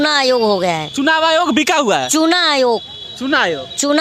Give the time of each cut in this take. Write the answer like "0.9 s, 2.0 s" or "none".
none